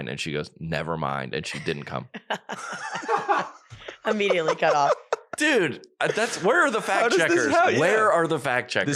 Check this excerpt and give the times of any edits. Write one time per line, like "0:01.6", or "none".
none